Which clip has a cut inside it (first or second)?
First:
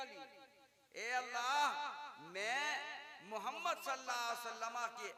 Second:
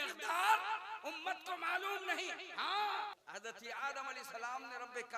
second